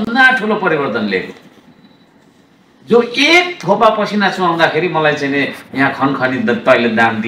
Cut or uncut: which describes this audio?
uncut